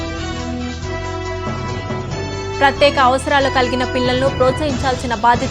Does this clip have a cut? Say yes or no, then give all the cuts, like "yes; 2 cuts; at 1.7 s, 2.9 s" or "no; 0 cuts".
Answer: no; 0 cuts